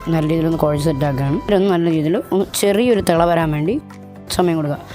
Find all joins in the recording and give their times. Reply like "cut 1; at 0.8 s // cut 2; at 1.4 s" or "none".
cut 1; at 1.5 s